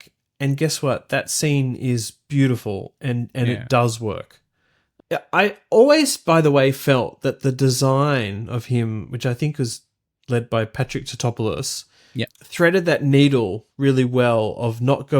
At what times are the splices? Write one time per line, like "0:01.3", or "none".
0:04.9
0:12.3